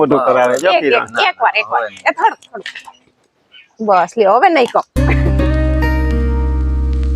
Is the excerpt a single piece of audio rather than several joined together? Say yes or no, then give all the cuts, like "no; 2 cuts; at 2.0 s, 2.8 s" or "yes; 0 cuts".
no; 1 cut; at 4.9 s